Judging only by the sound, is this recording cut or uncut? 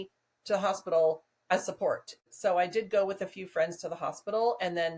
cut